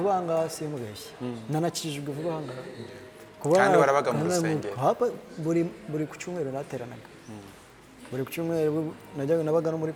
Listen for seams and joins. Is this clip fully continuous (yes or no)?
yes